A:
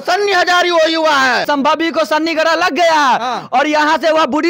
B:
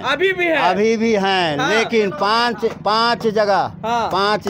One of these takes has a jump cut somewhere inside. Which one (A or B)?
A